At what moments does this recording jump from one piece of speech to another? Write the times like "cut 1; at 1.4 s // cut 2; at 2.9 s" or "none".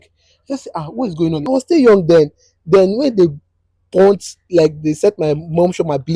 cut 1; at 1.4 s